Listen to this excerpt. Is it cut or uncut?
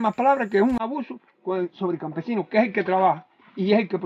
uncut